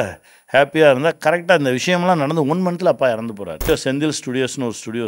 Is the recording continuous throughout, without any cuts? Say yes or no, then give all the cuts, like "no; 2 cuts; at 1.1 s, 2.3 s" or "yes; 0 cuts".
no; 1 cut; at 3.7 s